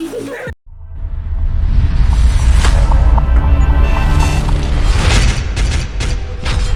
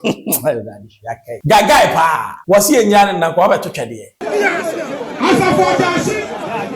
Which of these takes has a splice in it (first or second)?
second